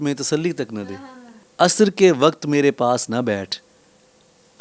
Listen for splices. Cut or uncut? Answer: cut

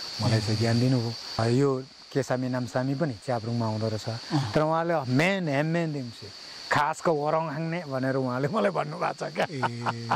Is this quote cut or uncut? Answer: cut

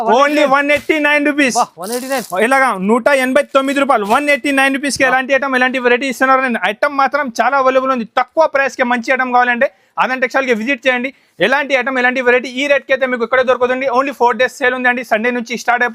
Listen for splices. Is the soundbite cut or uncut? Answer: uncut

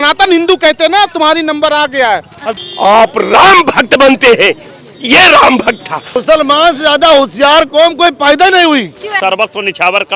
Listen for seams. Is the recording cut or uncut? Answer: cut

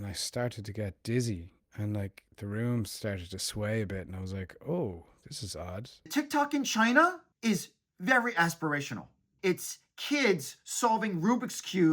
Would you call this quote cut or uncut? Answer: cut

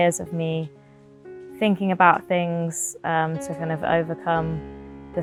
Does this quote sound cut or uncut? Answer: uncut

